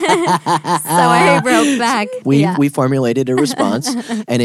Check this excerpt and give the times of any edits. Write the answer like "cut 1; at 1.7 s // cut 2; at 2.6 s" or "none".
cut 1; at 2.2 s

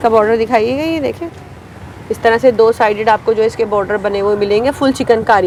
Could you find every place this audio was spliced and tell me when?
none

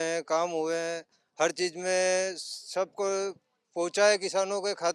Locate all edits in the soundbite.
none

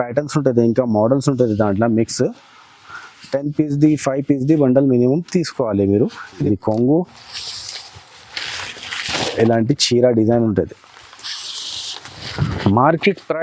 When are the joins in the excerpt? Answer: cut 1; at 6.4 s

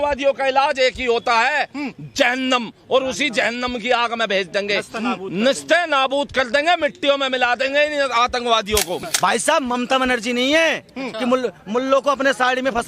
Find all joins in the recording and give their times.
cut 1; at 9.0 s

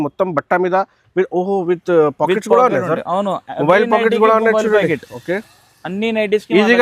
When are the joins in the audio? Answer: none

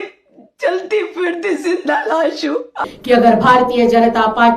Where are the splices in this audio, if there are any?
cut 1; at 2.8 s

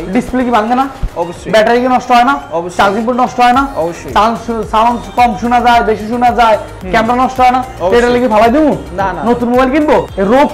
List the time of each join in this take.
none

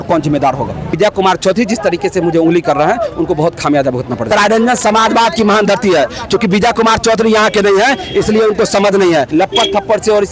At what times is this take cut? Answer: cut 1; at 0.9 s // cut 2; at 4.3 s // cut 3; at 9.3 s

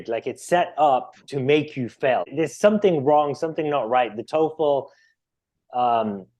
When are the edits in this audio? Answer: cut 1; at 2.3 s

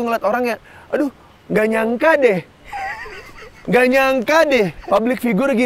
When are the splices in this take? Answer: cut 1; at 2.6 s // cut 2; at 4.8 s

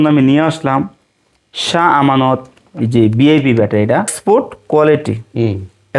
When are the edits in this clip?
cut 1; at 4.1 s

